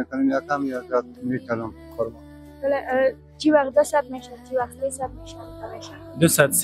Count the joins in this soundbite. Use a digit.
1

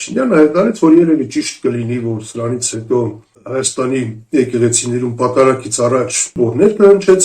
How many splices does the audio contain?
2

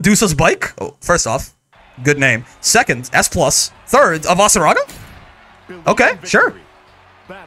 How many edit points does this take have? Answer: 0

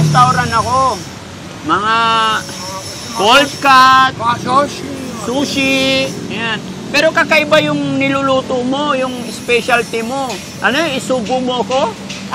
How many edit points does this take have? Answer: 0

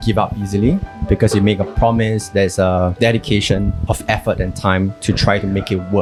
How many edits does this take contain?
0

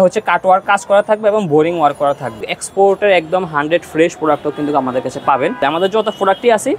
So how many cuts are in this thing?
2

